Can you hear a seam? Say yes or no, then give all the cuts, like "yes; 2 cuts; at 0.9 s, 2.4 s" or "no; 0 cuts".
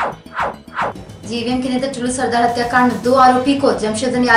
yes; 1 cut; at 1.0 s